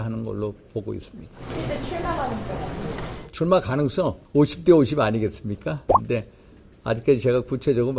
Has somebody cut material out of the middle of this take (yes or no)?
yes